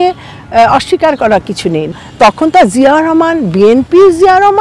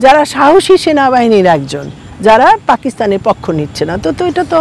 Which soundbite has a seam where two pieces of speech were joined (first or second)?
first